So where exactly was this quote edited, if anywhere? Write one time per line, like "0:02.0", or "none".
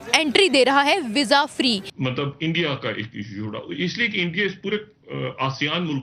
0:01.8